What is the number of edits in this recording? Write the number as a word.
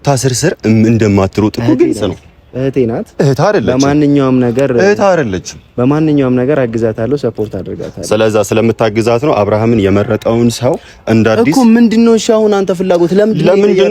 zero